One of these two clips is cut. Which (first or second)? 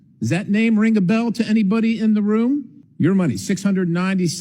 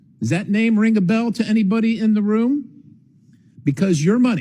first